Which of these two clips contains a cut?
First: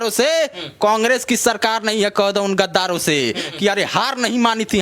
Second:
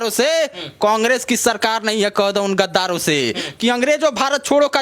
first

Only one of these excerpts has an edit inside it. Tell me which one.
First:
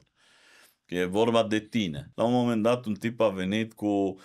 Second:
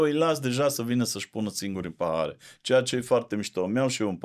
first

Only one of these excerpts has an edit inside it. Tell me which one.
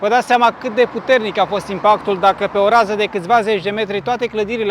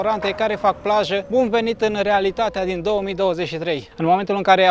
second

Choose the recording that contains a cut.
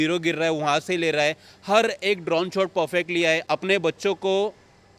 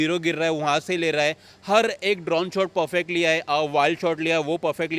first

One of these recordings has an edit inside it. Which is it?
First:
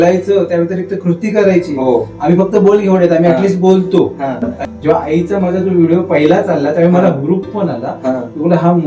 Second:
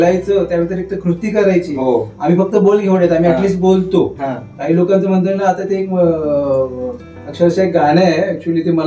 first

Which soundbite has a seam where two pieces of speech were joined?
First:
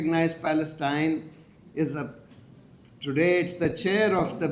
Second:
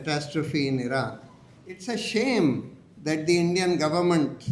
second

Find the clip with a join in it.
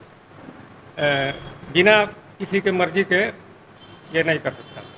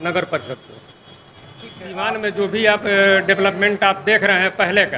second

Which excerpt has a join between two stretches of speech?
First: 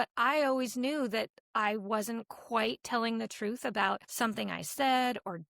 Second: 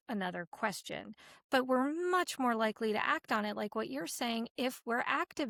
first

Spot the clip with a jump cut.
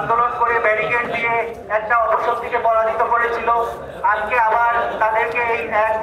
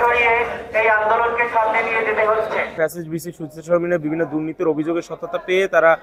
second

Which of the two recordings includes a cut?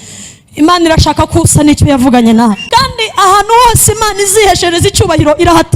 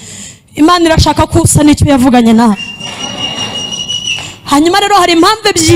first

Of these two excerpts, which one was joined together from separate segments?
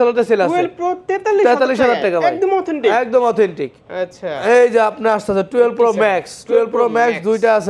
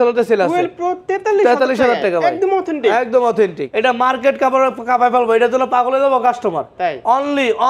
second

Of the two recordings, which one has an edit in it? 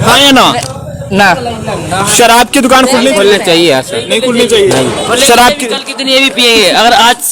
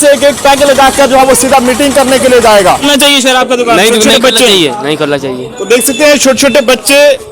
second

